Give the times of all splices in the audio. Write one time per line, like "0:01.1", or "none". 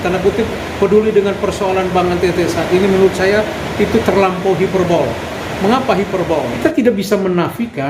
0:06.5